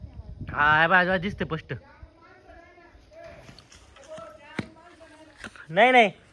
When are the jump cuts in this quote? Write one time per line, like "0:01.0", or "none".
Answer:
none